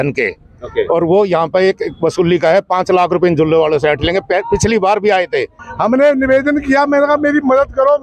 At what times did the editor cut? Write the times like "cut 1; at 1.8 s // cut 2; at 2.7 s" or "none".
cut 1; at 5.6 s